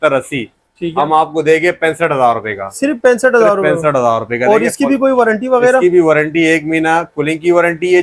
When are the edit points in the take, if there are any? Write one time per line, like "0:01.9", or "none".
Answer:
none